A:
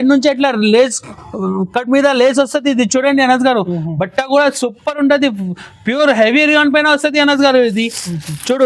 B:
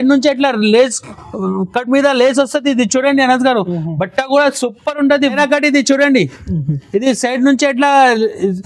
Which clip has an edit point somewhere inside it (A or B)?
B